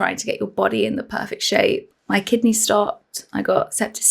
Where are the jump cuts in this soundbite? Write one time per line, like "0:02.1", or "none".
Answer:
0:01.9